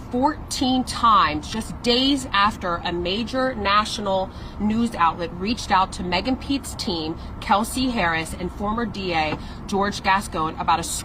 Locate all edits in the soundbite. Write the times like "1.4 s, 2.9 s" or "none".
none

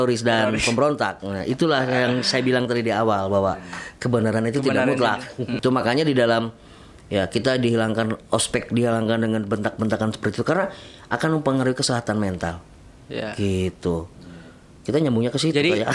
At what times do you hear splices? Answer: 5.6 s

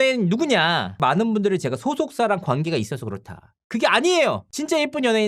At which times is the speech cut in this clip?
1.0 s

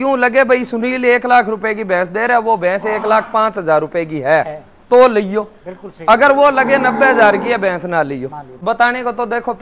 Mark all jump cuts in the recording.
8.5 s

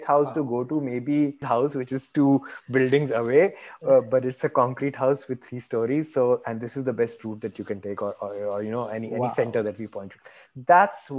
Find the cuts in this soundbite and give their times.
1.4 s

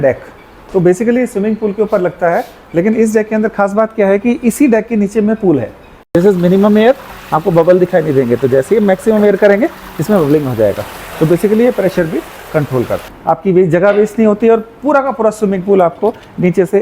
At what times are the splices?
6.1 s, 13.0 s

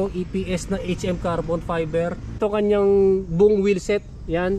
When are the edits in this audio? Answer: 2.4 s

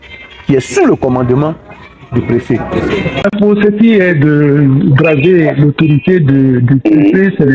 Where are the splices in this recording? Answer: 3.2 s

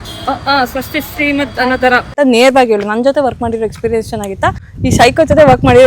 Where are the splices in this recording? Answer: 2.1 s, 4.7 s

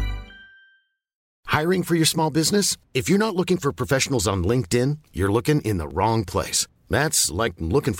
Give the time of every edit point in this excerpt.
1.4 s

